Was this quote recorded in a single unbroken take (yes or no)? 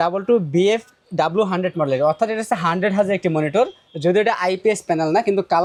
yes